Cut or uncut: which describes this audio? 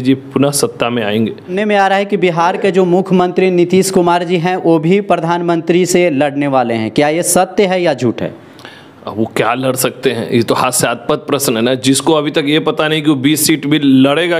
cut